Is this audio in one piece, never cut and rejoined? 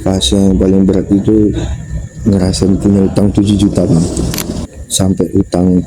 no; 1 cut; at 4.8 s

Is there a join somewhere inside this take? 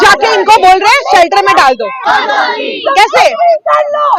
no; 0 cuts

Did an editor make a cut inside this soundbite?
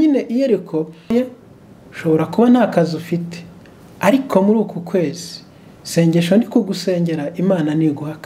yes; 1 cut; at 1.1 s

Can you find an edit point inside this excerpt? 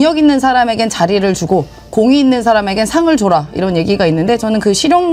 no; 0 cuts

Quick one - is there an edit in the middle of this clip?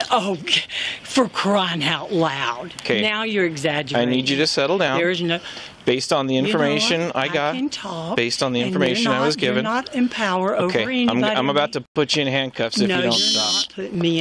no; 0 cuts

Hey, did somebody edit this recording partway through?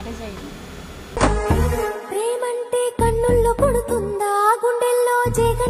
yes; 1 cut; at 1.1 s

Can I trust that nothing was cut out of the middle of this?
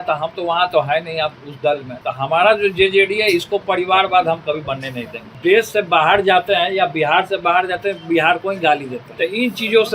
no; 3 cuts; at 1.9 s, 5.2 s, 9.0 s

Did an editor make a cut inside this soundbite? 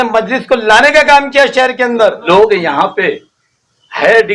yes; 1 cut; at 2.2 s

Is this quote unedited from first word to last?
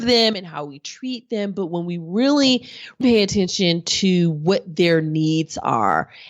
no; 1 cut; at 3.0 s

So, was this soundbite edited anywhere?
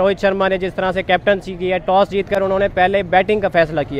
no; 0 cuts

